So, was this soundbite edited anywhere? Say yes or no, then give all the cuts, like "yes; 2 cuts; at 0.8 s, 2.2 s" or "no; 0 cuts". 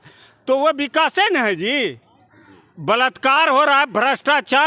no; 0 cuts